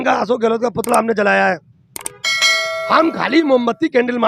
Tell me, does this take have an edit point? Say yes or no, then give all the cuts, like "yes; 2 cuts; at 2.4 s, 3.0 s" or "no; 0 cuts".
no; 0 cuts